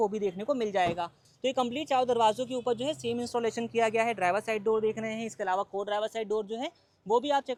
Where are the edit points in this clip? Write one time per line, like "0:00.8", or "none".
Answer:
none